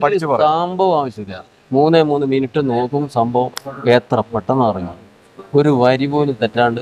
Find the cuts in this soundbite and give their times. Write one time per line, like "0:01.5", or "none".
none